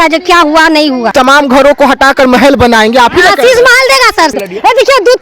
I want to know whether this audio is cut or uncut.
cut